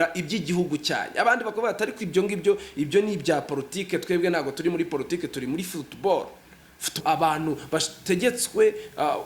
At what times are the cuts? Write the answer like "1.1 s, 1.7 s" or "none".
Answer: 6.9 s